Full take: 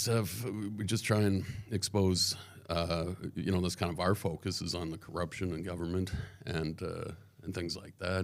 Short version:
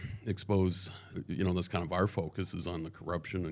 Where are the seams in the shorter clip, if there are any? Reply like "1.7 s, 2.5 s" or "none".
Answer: 1.1 s